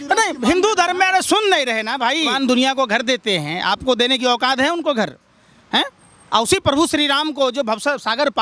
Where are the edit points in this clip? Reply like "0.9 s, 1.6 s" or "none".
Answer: 2.3 s